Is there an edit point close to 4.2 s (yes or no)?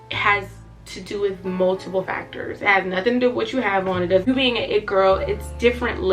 yes